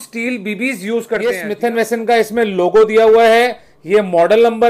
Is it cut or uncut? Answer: cut